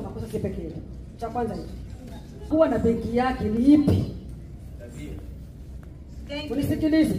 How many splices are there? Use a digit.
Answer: 1